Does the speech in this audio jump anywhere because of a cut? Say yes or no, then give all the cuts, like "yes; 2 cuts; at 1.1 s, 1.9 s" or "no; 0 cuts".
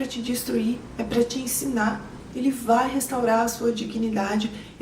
yes; 1 cut; at 2.1 s